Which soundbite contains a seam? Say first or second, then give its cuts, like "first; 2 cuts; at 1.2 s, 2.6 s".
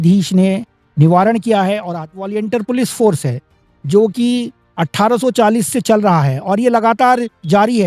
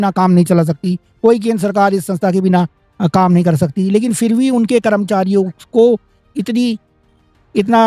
first; 1 cut; at 2.3 s